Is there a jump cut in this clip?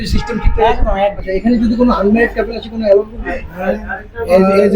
yes; 1 cut; at 1.3 s

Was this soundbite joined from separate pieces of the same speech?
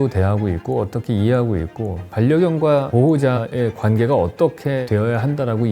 yes; 2 cuts; at 3.2 s, 4.8 s

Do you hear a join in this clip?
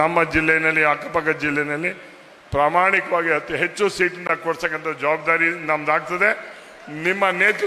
no; 0 cuts

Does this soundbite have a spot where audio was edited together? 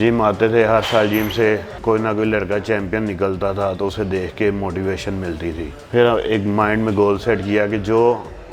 yes; 2 cuts; at 1.7 s, 5.7 s

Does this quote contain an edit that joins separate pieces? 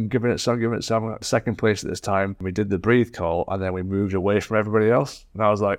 yes; 2 cuts; at 1.2 s, 2.4 s

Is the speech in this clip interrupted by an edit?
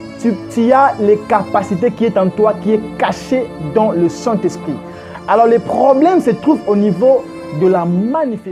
no; 0 cuts

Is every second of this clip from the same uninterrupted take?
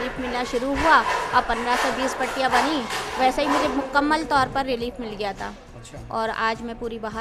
yes; 0 cuts

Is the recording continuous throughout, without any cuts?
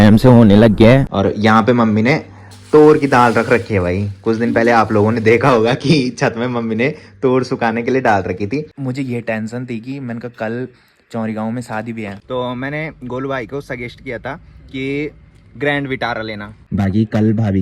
no; 4 cuts; at 1.1 s, 8.7 s, 12.2 s, 16.5 s

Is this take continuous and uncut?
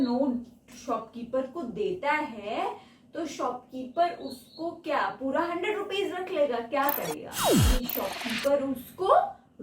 no; 1 cut; at 7.6 s

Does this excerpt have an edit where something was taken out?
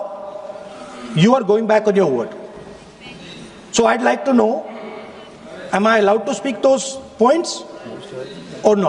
no; 0 cuts

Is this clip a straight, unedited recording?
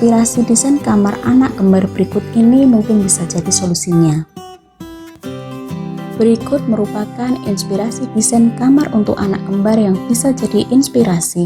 no; 2 cuts; at 4.3 s, 6.2 s

